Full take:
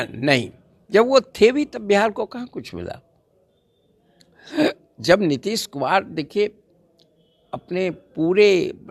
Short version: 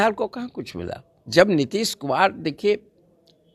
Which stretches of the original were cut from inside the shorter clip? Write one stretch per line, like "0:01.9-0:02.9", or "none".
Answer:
0:03.1-0:04.9